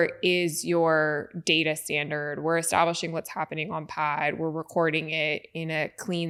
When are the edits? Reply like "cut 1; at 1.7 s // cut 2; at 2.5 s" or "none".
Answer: none